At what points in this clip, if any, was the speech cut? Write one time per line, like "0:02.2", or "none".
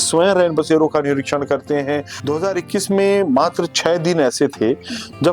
0:02.1

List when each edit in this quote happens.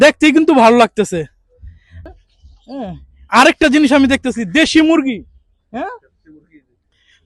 0:02.0

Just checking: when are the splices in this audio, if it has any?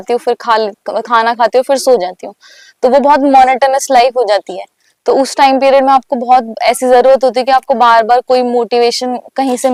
none

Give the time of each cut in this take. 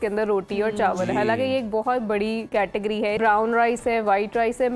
0:02.7

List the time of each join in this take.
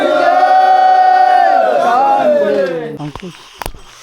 0:03.0

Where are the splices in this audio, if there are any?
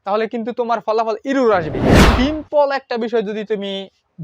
0:02.0

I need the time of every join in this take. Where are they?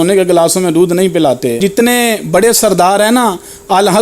0:01.6

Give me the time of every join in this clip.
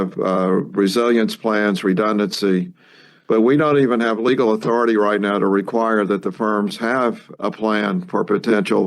0:07.3

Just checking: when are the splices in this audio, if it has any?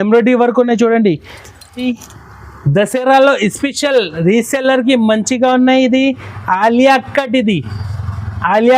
0:01.8

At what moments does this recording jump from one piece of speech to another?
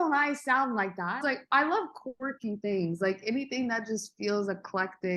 0:01.2

